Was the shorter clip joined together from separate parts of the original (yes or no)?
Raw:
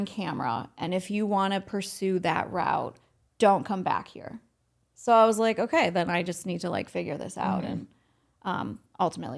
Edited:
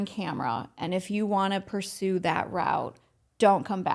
no